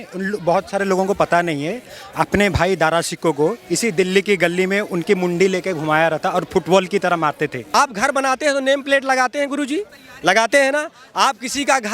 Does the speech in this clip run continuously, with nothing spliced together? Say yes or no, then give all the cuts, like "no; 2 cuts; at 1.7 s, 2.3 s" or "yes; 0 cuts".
no; 1 cut; at 7.7 s